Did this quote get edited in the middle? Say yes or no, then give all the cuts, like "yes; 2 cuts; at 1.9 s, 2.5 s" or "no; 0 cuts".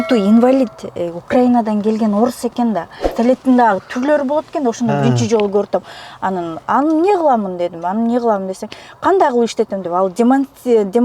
yes; 1 cut; at 3.0 s